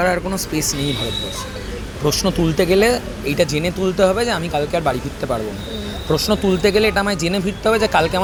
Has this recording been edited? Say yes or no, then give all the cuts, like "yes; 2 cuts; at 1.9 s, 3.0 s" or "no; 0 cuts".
no; 0 cuts